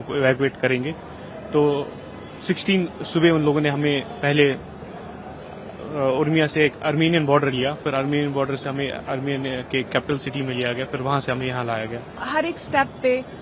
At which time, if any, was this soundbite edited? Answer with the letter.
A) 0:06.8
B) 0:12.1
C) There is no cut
B